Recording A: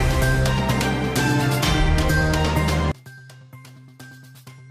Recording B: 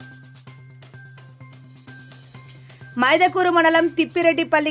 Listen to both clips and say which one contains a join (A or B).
B